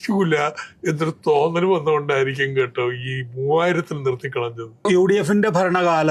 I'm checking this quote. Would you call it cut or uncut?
cut